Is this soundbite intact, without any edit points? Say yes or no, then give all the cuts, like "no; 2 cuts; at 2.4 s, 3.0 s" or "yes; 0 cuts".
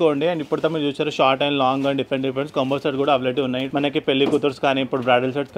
yes; 0 cuts